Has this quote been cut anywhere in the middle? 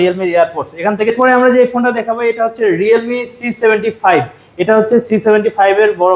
yes; 1 cut; at 1.1 s

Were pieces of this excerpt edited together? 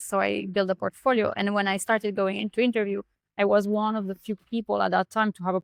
no; 0 cuts

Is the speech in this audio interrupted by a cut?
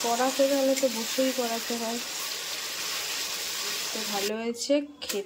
yes; 1 cut; at 3.9 s

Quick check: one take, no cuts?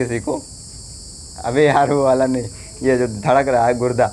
yes; 0 cuts

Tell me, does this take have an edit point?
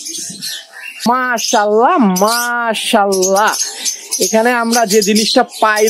yes; 1 cut; at 1.1 s

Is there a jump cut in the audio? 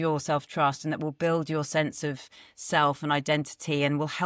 no; 0 cuts

